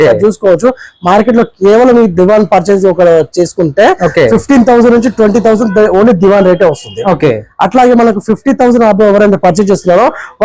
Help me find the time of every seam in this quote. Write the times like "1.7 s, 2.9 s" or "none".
none